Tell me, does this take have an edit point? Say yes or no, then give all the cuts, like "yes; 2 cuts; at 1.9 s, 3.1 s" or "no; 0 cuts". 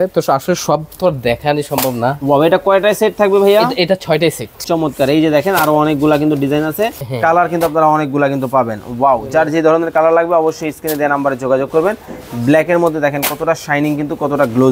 yes; 2 cuts; at 4.6 s, 7.0 s